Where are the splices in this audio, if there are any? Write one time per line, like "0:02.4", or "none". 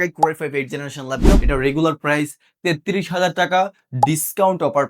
0:01.4